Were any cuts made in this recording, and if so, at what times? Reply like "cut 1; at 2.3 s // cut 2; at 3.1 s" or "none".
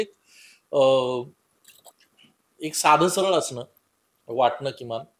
none